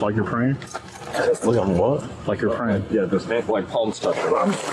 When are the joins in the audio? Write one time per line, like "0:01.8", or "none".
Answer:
none